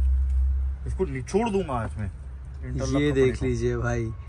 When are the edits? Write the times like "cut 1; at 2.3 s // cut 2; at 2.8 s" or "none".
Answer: none